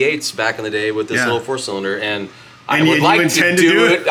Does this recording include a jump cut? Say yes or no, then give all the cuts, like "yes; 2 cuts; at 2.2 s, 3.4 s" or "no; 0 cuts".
no; 0 cuts